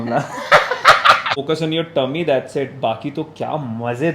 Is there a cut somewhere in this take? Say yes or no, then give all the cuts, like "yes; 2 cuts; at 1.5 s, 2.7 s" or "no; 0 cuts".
yes; 1 cut; at 1.4 s